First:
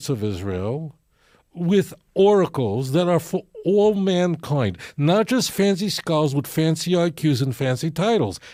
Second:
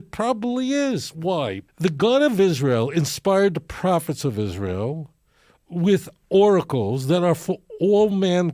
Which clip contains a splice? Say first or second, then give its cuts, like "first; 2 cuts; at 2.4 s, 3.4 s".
second; 1 cut; at 1.7 s